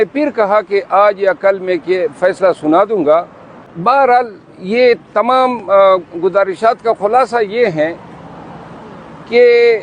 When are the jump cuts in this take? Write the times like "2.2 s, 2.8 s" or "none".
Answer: 3.7 s